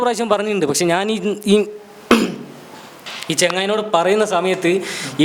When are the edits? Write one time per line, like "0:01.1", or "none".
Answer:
none